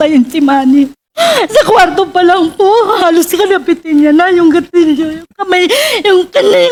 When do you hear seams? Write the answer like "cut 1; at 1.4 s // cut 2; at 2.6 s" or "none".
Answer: none